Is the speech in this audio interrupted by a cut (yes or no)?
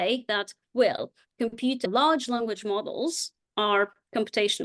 no